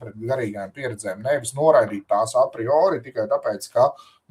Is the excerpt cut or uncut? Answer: uncut